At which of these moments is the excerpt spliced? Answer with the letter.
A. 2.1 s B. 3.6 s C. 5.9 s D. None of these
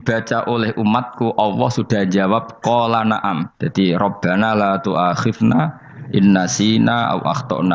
B